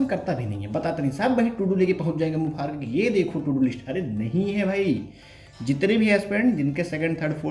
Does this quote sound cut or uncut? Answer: uncut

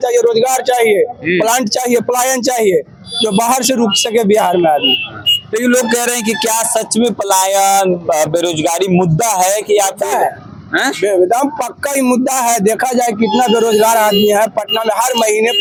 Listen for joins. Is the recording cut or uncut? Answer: uncut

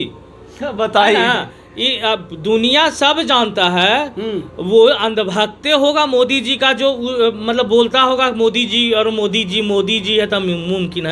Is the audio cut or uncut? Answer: uncut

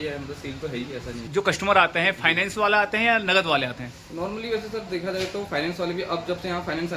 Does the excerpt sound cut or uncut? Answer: cut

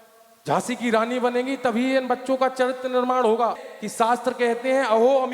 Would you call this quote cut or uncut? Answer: uncut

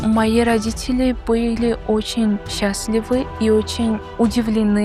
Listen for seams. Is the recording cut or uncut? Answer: uncut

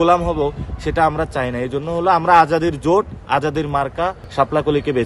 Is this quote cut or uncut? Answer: uncut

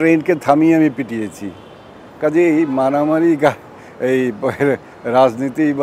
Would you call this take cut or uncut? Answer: uncut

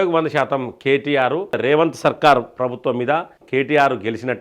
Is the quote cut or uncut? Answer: cut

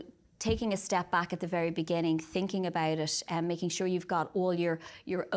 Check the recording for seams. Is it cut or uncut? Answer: uncut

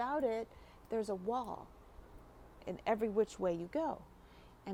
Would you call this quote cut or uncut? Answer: uncut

